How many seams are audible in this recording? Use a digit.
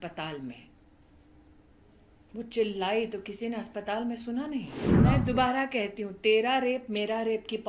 1